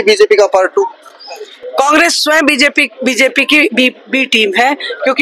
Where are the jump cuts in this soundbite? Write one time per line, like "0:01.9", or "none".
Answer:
none

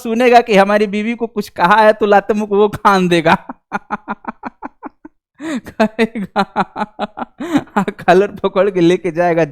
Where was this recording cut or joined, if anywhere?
none

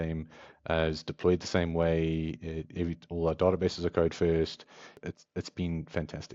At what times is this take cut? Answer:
0:05.0

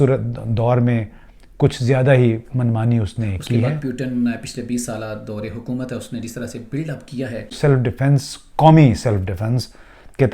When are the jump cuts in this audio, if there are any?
0:03.7
0:07.5

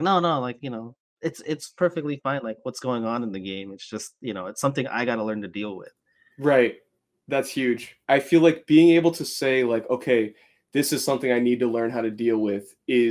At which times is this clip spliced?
0:07.9

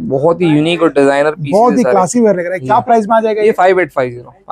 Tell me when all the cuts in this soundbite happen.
none

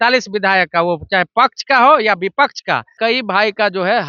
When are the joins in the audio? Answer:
0:02.9

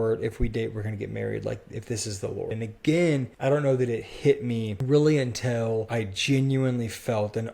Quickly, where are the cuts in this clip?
0:02.5
0:03.3
0:04.7
0:05.9

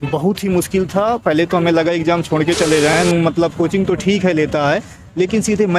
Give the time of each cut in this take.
0:03.0

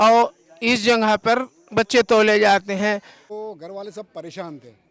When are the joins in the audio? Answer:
0:03.3

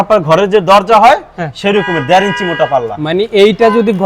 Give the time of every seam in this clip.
none

